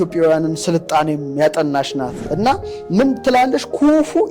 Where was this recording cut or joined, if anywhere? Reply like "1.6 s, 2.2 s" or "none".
2.2 s